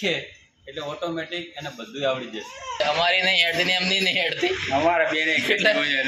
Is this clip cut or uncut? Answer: cut